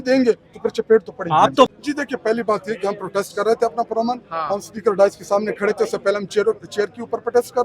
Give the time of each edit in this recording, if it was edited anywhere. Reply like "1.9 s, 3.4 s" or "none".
1.7 s